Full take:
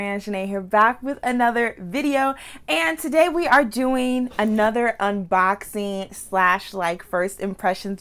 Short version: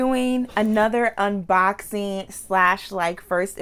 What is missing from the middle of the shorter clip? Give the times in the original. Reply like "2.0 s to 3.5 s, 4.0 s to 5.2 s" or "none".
none